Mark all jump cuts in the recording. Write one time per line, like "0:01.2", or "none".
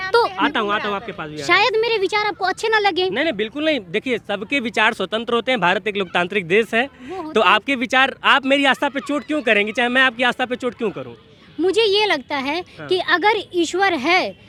none